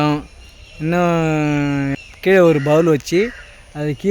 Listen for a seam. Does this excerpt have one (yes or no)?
yes